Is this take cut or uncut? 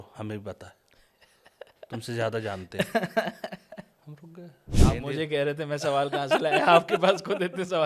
cut